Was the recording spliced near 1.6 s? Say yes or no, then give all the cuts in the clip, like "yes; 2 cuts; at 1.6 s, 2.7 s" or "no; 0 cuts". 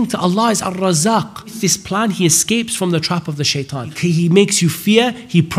yes; 2 cuts; at 1.6 s, 3.9 s